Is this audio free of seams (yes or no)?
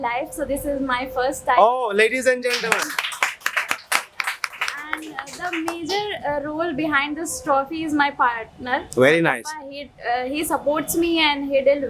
yes